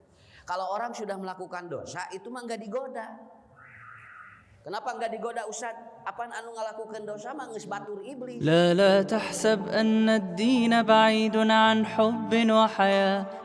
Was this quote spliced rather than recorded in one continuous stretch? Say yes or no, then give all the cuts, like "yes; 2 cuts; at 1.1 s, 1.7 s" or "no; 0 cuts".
yes; 1 cut; at 8.4 s